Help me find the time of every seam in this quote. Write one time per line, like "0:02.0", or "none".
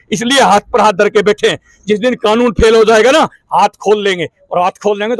none